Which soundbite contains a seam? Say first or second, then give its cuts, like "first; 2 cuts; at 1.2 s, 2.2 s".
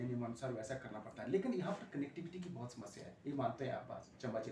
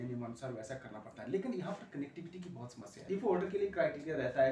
second; 1 cut; at 3.0 s